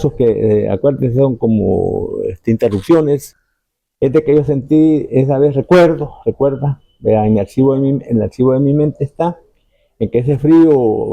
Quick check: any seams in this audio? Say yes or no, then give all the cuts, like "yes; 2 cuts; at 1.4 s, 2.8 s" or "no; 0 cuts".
yes; 1 cut; at 3.3 s